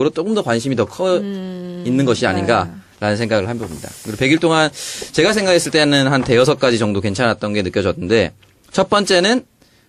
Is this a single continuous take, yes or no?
no